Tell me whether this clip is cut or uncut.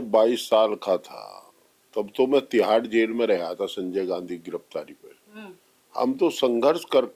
uncut